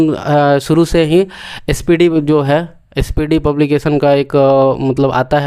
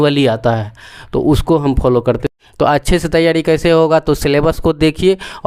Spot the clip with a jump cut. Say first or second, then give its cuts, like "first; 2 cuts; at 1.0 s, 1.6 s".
second; 1 cut; at 2.3 s